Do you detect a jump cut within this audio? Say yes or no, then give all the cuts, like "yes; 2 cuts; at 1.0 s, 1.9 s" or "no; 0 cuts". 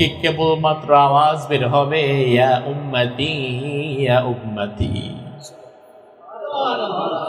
no; 0 cuts